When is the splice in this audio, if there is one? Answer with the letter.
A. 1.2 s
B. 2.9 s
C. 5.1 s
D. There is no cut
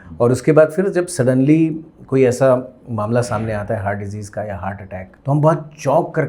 C